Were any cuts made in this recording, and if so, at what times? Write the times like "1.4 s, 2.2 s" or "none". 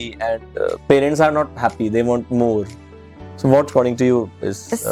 none